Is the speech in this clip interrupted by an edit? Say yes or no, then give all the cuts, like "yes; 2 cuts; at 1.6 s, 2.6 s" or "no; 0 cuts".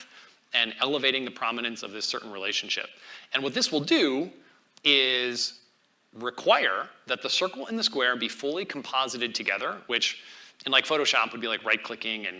no; 0 cuts